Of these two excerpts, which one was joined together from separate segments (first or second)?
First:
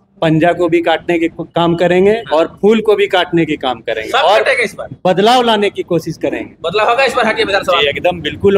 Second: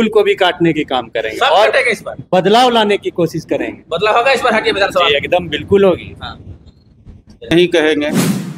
second